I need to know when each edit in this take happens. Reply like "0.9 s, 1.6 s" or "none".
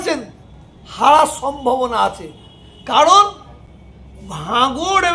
none